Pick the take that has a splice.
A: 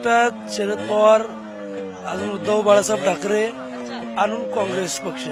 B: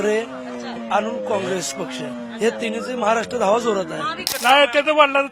B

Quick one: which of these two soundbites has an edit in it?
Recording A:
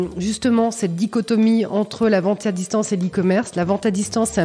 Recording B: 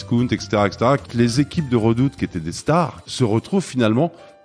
B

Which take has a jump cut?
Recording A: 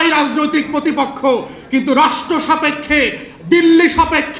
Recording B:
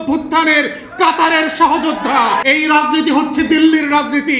B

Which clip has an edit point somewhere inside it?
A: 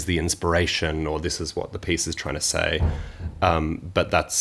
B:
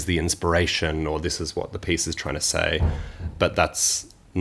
B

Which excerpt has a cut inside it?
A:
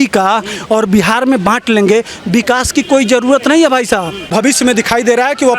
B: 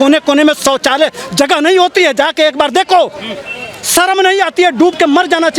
A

